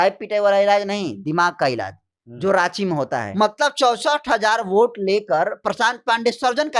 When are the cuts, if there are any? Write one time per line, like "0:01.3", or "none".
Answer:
0:03.3

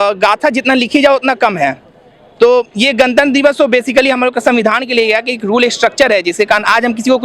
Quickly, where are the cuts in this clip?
none

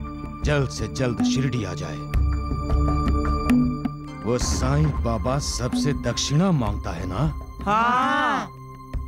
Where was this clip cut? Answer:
none

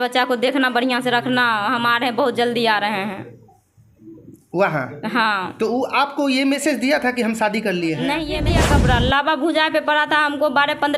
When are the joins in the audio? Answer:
0:08.5

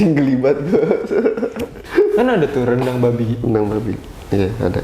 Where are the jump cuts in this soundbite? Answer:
0:01.8

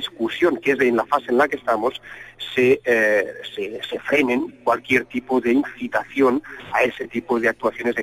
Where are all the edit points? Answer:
0:04.2

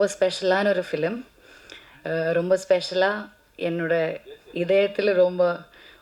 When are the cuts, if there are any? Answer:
none

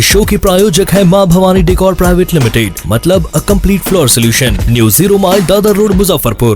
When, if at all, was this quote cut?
none

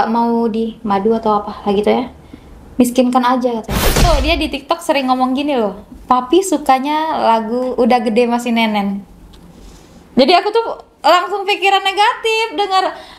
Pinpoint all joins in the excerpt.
0:04.0

